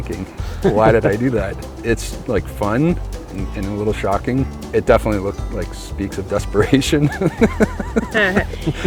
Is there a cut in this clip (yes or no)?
yes